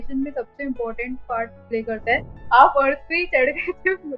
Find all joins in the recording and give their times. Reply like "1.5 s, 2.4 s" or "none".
2.3 s